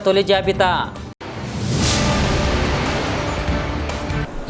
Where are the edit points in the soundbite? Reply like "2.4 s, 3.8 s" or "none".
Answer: none